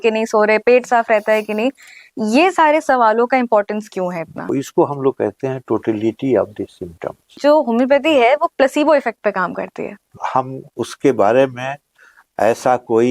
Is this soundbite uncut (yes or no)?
no